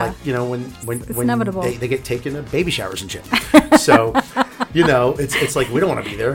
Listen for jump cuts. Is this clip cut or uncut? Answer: uncut